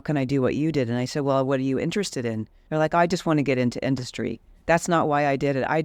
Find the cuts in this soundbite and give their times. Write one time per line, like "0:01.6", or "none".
0:02.5
0:04.5